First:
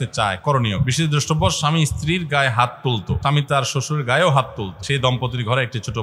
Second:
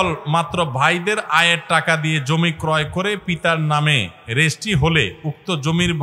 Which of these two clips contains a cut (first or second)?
first